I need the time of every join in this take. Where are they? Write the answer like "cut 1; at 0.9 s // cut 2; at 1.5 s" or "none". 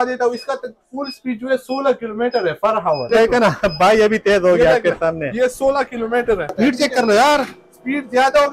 cut 1; at 3.1 s // cut 2; at 6.5 s